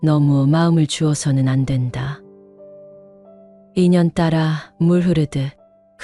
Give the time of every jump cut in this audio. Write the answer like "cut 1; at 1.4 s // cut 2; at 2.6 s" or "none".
cut 1; at 2.2 s // cut 2; at 3.7 s